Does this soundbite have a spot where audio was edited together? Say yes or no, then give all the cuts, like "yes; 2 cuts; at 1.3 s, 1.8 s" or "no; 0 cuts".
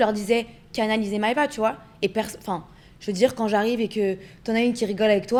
no; 0 cuts